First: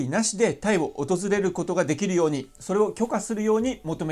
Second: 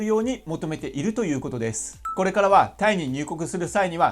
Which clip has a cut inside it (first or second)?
second